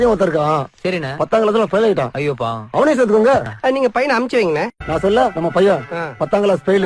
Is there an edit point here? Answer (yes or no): yes